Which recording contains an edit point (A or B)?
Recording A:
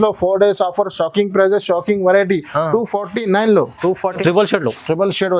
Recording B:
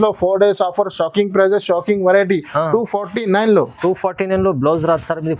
A